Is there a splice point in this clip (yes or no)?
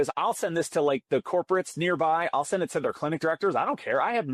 no